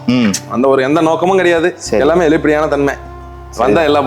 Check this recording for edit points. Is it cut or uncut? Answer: uncut